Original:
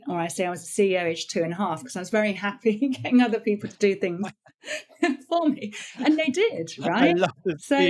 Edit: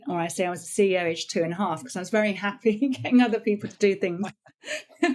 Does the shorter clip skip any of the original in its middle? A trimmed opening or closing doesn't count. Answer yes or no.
no